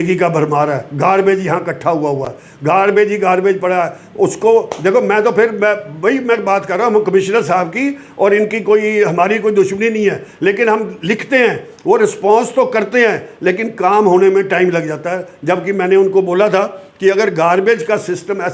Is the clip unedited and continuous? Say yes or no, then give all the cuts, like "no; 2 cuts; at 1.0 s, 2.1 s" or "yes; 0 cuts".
yes; 0 cuts